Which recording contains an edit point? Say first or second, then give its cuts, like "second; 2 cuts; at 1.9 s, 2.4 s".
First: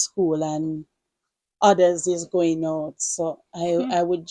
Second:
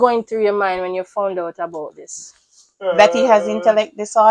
second; 1 cut; at 2.7 s